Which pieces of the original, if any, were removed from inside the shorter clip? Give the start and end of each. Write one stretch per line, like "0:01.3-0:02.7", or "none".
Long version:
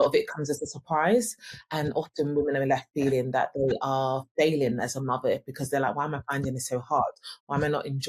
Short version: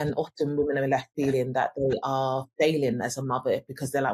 none